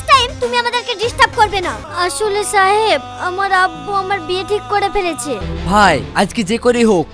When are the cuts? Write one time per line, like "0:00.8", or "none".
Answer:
0:01.8
0:05.5